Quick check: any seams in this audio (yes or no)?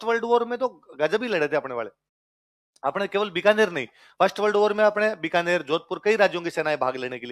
no